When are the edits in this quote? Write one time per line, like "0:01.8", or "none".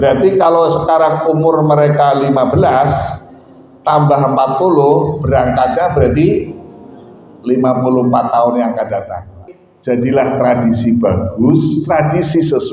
0:09.4